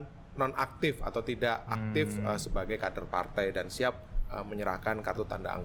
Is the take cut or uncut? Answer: uncut